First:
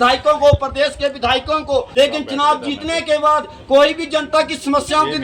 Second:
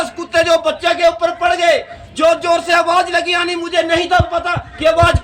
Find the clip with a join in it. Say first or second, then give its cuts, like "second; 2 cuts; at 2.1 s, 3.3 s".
first; 1 cut; at 1.9 s